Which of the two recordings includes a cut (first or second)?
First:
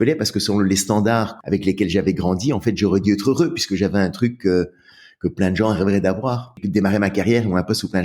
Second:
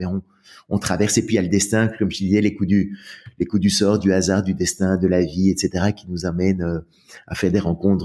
first